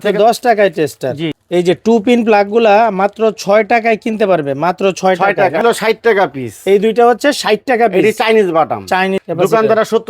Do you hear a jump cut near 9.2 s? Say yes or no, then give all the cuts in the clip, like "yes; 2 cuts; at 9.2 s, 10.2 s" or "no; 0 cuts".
yes; 3 cuts; at 1.4 s, 5.6 s, 9.2 s